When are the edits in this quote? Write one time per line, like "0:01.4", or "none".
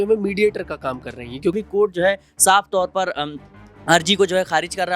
0:01.5